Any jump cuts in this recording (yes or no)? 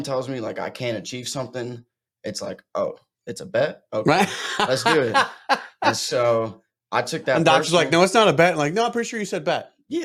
no